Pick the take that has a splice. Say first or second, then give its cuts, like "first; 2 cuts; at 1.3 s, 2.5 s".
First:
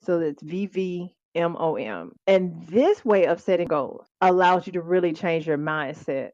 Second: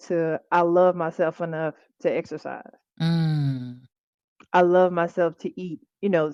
first; 3 cuts; at 1.1 s, 2.1 s, 3.7 s